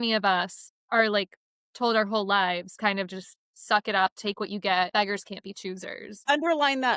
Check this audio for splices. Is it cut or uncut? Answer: cut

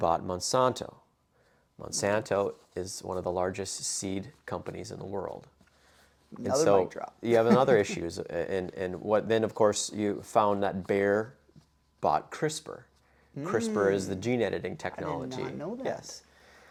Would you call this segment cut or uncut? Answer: uncut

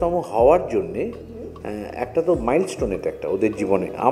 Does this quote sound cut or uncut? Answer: uncut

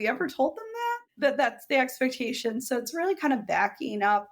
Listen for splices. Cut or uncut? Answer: cut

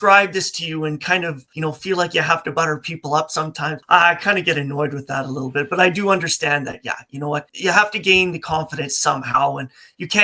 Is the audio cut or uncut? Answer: cut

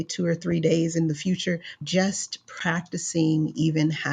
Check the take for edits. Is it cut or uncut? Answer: cut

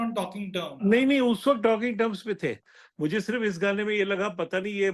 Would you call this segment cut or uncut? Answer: cut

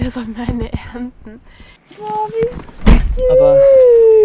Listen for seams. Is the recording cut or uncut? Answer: cut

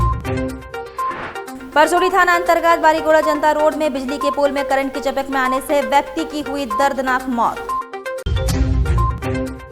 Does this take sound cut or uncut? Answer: cut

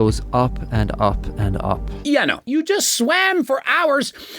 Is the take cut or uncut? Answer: cut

